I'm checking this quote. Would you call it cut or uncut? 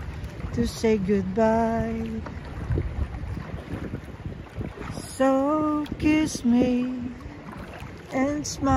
uncut